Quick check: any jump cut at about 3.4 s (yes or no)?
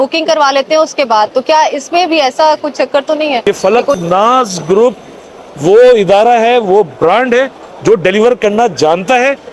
yes